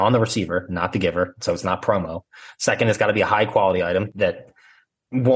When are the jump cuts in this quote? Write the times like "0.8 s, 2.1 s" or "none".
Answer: 4.1 s